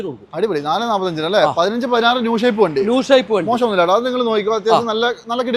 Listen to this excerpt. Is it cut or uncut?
uncut